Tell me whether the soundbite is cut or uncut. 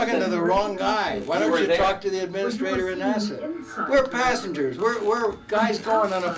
uncut